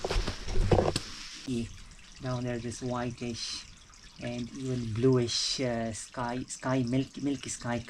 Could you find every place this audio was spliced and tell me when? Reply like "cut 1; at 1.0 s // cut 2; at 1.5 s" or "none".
cut 1; at 1.5 s